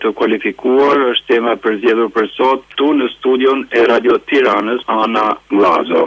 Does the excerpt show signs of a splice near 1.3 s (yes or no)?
no